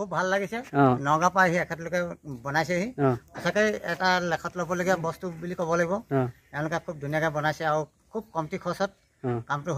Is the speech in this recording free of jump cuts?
yes; 0 cuts

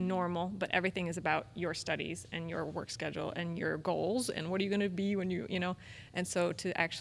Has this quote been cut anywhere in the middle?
no; 0 cuts

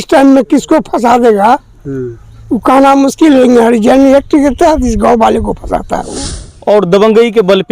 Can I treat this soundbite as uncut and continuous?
no; 1 cut; at 6.1 s

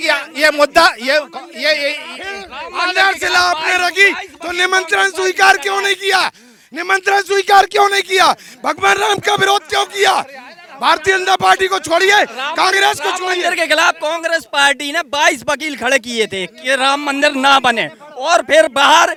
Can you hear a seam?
no; 0 cuts

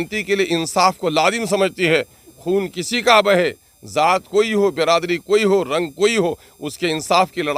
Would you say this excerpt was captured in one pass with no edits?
yes; 0 cuts

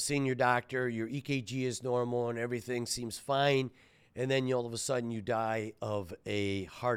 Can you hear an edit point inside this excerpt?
no; 0 cuts

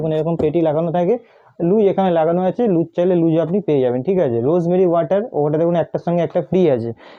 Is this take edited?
no; 0 cuts

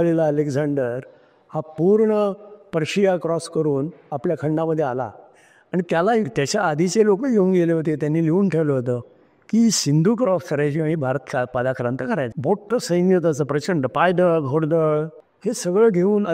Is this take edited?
no; 0 cuts

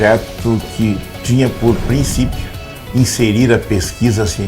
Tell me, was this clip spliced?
yes; 1 cut; at 1.1 s

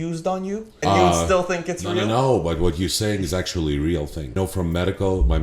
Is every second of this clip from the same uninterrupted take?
no; 2 cuts; at 0.8 s, 4.3 s

